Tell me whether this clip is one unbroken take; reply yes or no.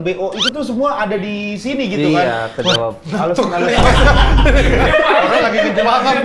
yes